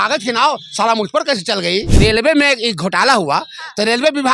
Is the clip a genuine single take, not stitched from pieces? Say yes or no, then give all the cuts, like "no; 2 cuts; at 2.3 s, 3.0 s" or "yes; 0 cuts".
no; 1 cut; at 1.9 s